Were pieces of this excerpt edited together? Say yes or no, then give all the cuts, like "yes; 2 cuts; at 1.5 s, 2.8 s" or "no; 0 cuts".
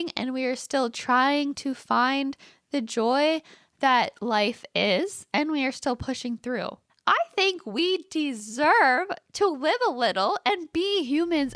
yes; 1 cut; at 6.8 s